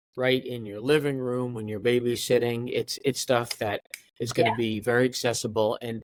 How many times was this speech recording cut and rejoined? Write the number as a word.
zero